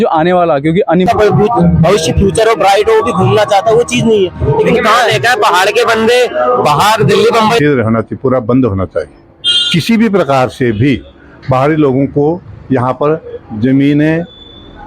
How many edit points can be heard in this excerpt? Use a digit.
2